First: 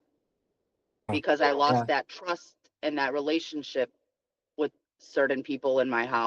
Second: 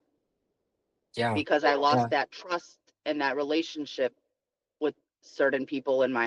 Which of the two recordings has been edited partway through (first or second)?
first